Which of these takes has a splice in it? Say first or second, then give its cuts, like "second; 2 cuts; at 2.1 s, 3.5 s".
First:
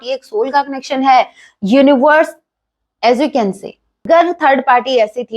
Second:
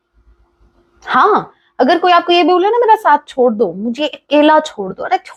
first; 1 cut; at 4.0 s